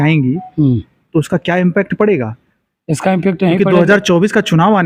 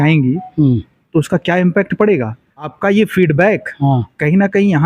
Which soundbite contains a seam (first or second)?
second